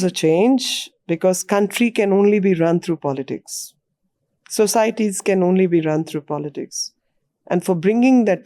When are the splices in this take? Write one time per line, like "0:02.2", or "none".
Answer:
none